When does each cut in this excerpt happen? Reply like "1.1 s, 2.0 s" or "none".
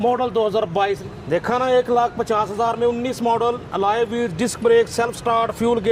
1.0 s